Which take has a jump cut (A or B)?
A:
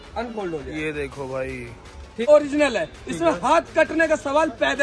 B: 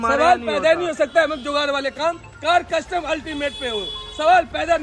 A